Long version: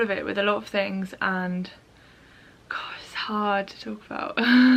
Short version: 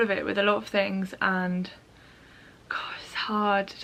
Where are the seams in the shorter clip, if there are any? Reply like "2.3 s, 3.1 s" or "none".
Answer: none